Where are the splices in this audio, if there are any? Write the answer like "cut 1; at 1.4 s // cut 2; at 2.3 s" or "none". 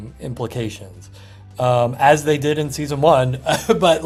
none